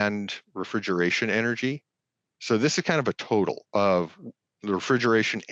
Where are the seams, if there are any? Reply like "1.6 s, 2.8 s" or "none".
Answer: 3.6 s